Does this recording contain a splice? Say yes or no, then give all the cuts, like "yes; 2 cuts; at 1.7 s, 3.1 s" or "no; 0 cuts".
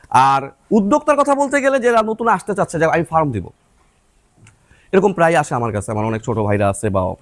no; 0 cuts